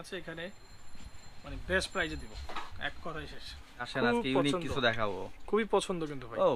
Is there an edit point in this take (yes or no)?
yes